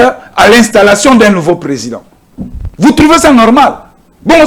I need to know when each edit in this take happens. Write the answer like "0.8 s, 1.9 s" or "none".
none